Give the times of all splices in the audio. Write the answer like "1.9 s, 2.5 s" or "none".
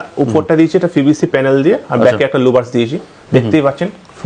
none